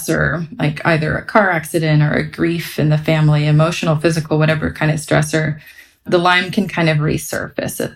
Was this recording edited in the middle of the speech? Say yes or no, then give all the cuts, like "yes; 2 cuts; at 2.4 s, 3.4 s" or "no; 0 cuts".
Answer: no; 0 cuts